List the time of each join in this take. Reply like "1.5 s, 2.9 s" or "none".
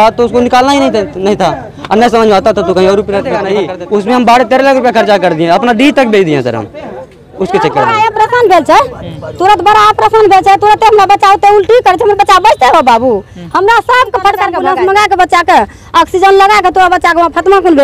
3.4 s, 7.9 s, 14.6 s